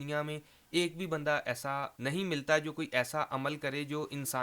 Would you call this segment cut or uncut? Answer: cut